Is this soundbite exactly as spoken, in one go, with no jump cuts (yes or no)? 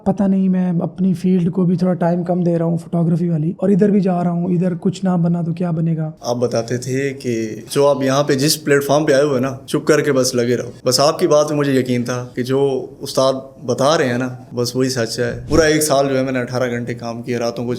no